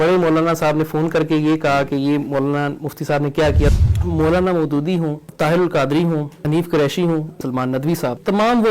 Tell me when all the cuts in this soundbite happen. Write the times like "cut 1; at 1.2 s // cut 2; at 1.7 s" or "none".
cut 1; at 3.7 s // cut 2; at 5.2 s // cut 3; at 6.4 s // cut 4; at 7.7 s